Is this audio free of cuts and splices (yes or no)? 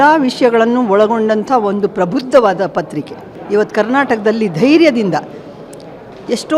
no